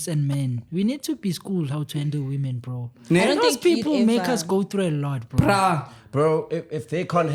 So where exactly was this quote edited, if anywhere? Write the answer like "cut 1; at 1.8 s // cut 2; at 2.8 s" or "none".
none